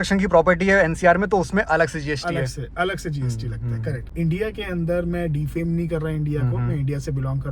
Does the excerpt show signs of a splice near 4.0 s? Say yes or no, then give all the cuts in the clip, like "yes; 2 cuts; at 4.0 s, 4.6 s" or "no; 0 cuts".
yes; 1 cut; at 4.0 s